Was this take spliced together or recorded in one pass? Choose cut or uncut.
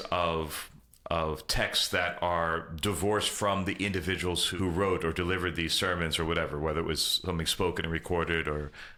uncut